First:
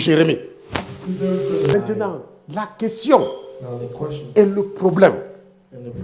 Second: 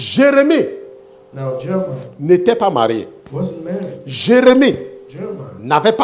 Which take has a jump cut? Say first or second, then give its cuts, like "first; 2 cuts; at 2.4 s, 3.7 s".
first; 1 cut; at 1.7 s